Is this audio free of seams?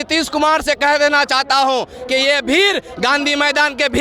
yes; 0 cuts

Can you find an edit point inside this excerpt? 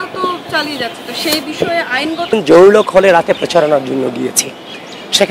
no; 0 cuts

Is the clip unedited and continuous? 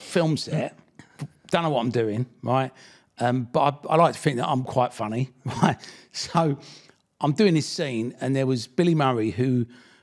yes; 0 cuts

